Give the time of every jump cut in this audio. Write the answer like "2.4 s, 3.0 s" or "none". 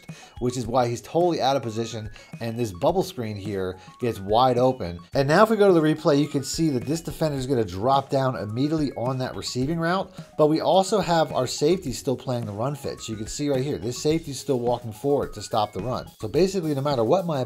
5.0 s, 16.2 s